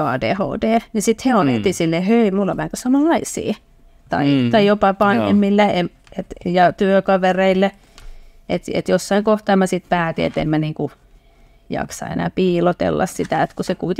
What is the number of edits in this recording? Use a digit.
0